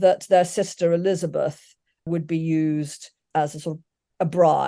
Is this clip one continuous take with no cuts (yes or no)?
no